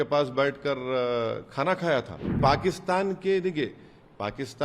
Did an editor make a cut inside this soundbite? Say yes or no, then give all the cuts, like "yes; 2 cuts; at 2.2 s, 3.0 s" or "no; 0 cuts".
yes; 1 cut; at 2.4 s